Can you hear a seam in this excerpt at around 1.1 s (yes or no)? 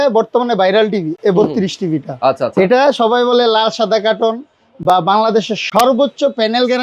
no